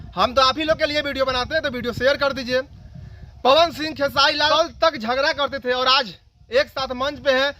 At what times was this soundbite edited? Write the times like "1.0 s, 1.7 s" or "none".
4.5 s